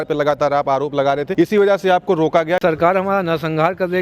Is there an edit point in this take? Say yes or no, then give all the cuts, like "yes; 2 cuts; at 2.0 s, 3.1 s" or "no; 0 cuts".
yes; 2 cuts; at 1.3 s, 2.6 s